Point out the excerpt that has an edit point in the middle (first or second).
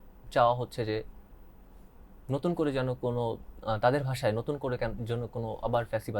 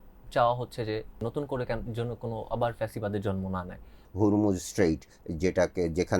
second